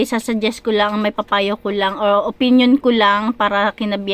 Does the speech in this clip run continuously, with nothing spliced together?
yes; 0 cuts

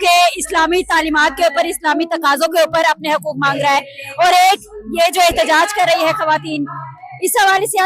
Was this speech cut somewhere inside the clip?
no; 0 cuts

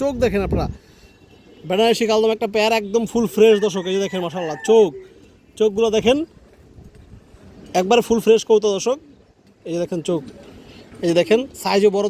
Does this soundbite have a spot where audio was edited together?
no; 0 cuts

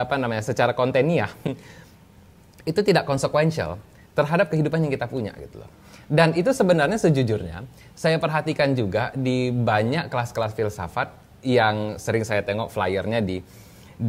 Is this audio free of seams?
yes; 0 cuts

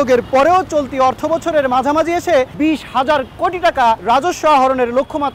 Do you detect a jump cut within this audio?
yes; 2 cuts; at 2.5 s, 4.0 s

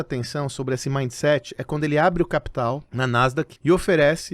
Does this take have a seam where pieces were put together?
yes; 1 cut; at 3.1 s

